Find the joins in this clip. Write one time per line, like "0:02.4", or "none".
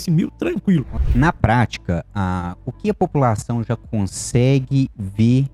0:01.0